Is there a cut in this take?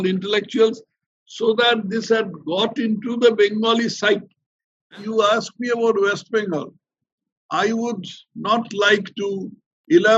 yes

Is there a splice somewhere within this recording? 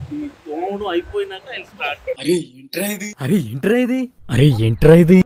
no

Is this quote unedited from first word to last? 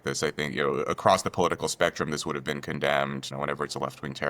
no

